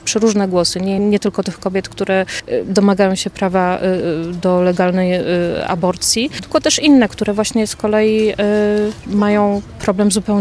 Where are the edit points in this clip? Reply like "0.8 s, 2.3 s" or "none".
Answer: 1.0 s, 2.4 s, 6.4 s, 9.0 s